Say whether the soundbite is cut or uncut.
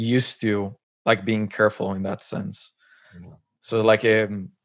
uncut